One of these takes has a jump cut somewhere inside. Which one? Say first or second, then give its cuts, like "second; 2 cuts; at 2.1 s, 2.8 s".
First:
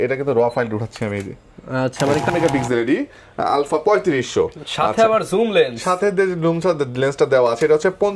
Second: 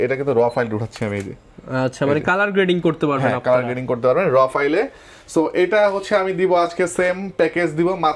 first; 1 cut; at 2.3 s